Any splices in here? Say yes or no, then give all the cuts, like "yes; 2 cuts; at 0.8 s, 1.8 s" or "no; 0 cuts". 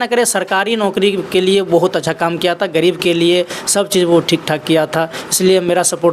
no; 0 cuts